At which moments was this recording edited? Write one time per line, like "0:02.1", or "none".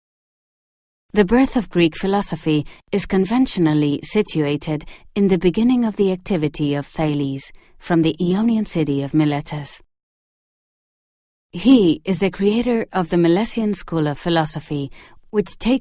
0:02.4

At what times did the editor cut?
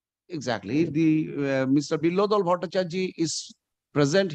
none

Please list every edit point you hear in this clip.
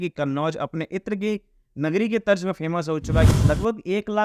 0:03.3

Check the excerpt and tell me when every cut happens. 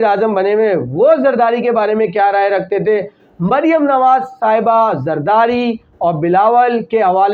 none

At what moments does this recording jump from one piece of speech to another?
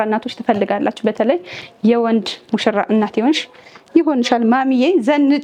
none

